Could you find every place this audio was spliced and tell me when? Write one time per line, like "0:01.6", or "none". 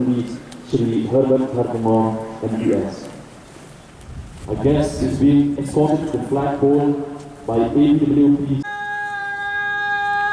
0:08.7